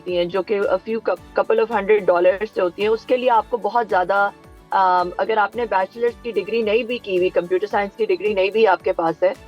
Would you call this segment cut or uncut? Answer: uncut